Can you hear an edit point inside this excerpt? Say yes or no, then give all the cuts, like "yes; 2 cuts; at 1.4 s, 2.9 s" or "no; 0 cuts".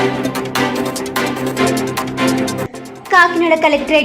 yes; 1 cut; at 2.4 s